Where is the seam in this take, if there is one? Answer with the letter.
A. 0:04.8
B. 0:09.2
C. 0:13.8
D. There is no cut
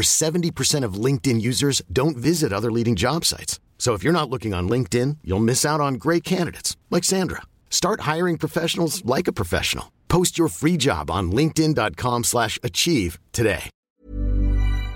C